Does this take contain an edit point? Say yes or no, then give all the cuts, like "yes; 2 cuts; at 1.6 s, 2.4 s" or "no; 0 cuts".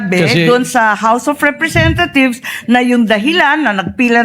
no; 0 cuts